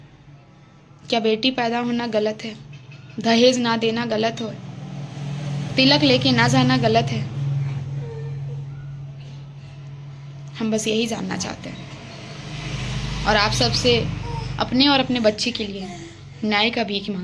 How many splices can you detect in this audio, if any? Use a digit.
0